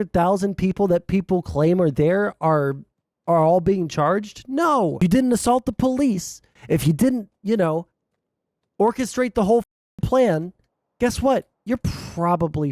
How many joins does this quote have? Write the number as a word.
one